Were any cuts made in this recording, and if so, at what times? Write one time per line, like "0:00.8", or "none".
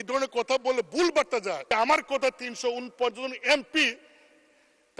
0:01.6